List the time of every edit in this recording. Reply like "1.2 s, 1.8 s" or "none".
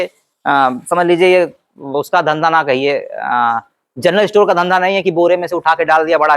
none